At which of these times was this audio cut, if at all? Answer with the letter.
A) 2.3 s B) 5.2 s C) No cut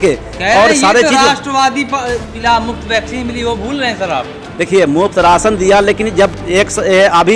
A